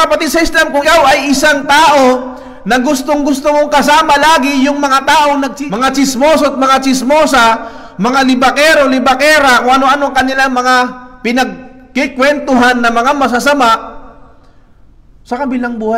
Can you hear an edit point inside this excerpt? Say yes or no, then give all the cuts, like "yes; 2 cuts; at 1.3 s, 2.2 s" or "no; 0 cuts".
yes; 2 cuts; at 0.8 s, 5.6 s